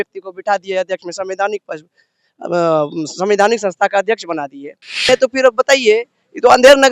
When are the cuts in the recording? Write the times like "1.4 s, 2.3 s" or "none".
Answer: 5.1 s